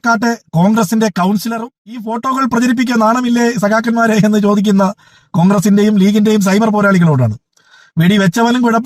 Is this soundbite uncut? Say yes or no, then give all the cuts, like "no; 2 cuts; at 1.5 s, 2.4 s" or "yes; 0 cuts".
no; 1 cut; at 2.1 s